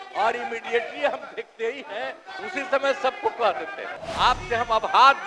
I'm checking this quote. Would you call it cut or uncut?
cut